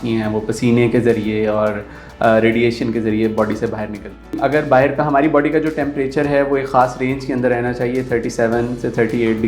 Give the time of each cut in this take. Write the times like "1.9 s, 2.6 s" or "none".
4.4 s

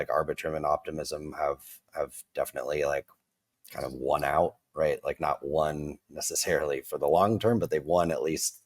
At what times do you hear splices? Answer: none

